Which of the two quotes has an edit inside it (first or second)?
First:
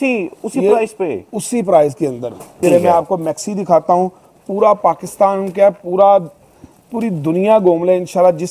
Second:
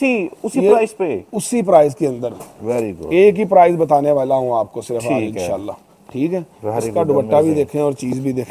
first